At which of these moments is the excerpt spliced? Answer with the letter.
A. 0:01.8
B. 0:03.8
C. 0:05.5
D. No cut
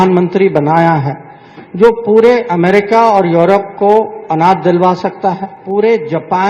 C